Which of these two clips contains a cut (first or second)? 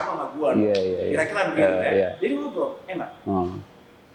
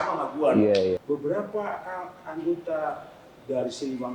second